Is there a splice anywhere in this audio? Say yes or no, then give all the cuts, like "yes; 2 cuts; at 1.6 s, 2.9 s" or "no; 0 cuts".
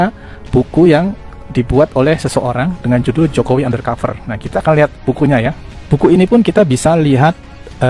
no; 0 cuts